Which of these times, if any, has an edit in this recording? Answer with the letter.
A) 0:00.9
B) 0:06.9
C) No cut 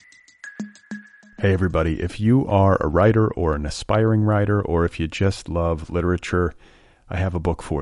A